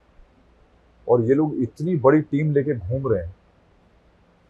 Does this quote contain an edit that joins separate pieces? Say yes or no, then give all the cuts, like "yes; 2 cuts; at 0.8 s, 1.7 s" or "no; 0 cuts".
no; 0 cuts